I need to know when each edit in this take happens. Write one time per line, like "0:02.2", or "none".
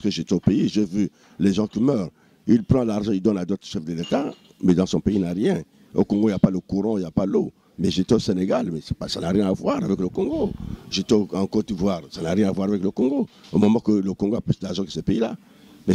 none